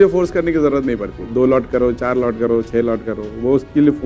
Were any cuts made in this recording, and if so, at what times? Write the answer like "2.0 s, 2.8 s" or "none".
1.3 s